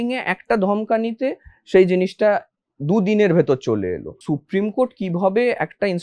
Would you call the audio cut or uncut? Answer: cut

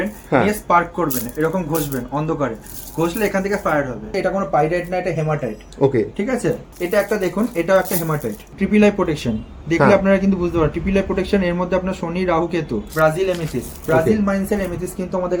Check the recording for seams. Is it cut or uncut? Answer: cut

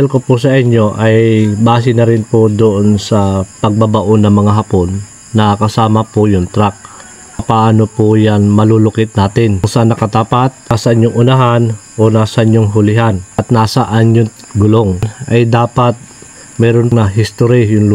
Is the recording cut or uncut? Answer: cut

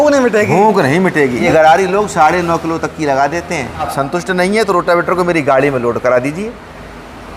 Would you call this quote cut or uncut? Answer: cut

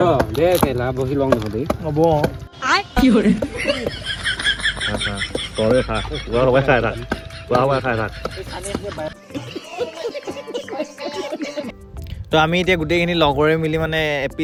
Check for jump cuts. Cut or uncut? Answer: uncut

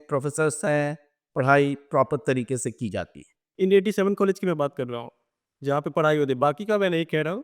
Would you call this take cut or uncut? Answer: cut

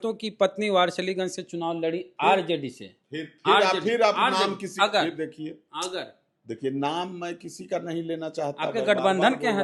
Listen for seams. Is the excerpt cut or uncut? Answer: uncut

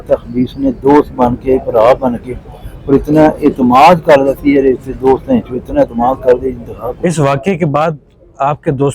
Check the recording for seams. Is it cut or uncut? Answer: cut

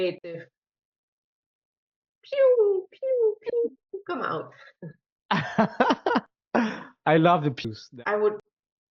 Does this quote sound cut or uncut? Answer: cut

